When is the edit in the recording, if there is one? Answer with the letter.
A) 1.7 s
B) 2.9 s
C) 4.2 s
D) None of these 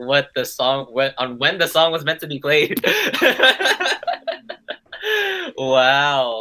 D